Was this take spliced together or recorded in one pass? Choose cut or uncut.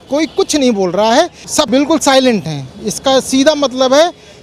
cut